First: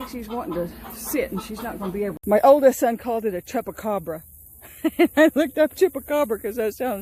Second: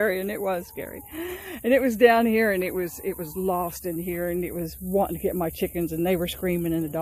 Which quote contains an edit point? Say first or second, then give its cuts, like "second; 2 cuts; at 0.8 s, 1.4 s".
first; 1 cut; at 2.2 s